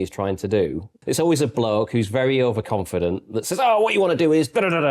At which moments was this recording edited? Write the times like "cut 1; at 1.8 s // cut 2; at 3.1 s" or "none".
cut 1; at 0.9 s